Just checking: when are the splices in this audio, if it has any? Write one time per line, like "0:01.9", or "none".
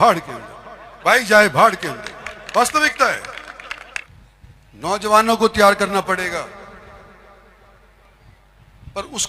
0:04.1